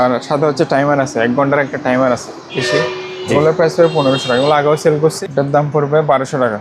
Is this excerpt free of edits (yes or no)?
no